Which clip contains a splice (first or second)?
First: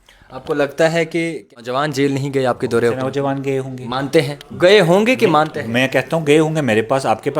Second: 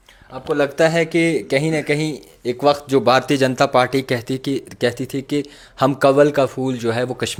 first